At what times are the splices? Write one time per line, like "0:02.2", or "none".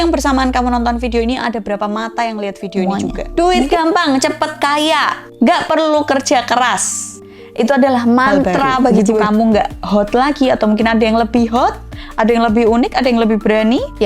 0:02.8
0:09.2